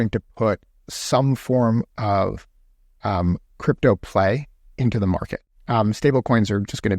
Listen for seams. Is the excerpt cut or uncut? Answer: cut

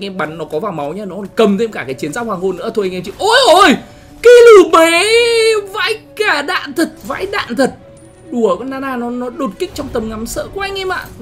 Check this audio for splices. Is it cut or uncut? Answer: cut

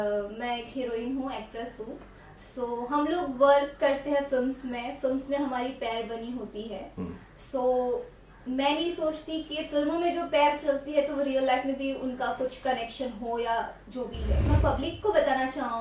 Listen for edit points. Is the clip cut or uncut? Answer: cut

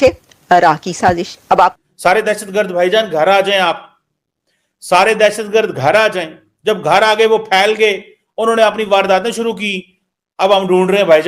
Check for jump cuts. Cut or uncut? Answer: cut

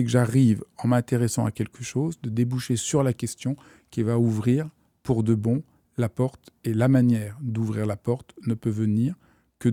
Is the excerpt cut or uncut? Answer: uncut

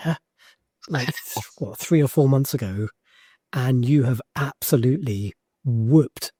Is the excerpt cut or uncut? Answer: uncut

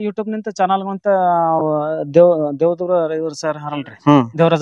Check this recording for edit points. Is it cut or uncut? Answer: uncut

